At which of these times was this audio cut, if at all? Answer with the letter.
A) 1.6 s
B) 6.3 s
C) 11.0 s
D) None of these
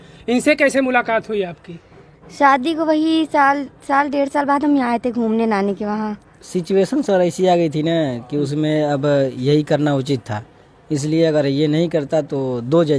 B